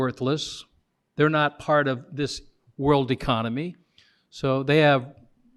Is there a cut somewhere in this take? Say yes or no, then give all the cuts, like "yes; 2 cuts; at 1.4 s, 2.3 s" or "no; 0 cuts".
no; 0 cuts